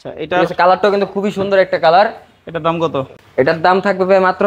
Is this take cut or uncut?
cut